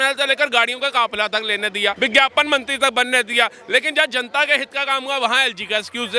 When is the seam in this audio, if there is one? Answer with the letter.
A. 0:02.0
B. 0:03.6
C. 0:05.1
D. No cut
A